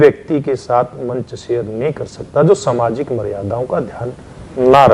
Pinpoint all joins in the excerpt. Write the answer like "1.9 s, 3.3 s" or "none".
none